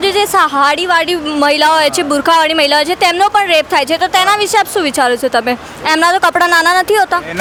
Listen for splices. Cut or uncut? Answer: uncut